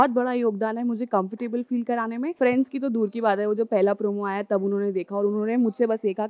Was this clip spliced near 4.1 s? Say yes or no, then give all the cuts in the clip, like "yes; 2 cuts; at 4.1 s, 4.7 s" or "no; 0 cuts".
no; 1 cut; at 2.3 s